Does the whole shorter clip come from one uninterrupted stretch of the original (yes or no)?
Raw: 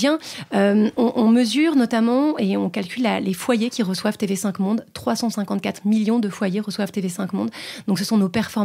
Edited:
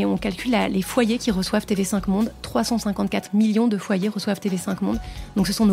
yes